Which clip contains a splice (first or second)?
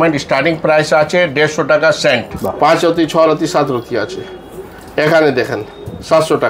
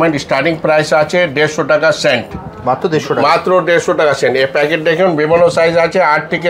first